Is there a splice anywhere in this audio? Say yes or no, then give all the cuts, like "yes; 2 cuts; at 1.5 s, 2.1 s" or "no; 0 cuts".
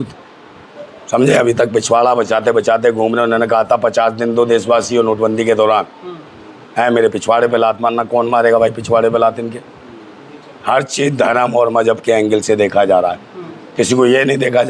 no; 0 cuts